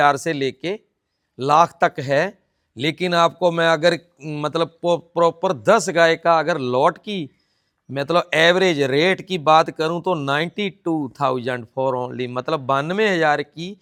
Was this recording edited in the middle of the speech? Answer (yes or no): no